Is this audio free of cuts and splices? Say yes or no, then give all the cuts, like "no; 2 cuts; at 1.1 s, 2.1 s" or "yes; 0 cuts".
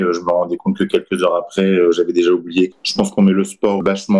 no; 1 cut; at 2.8 s